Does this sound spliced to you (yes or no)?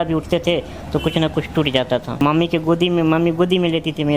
yes